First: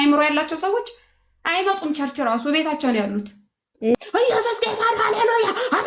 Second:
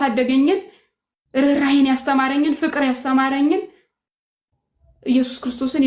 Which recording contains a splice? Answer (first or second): first